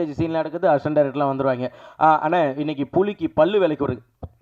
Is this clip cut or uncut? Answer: uncut